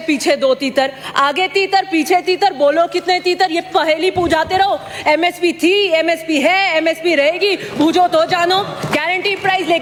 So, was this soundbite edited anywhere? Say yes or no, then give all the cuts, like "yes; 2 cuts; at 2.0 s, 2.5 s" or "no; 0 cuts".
no; 0 cuts